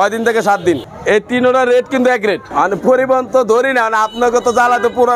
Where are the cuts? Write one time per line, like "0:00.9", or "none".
0:00.9
0:02.5